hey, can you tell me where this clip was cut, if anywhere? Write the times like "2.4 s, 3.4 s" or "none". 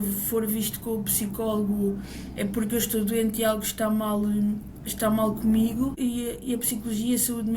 6.0 s